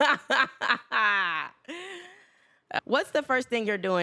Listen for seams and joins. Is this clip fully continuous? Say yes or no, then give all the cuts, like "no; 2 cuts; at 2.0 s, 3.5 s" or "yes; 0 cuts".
no; 1 cut; at 2.8 s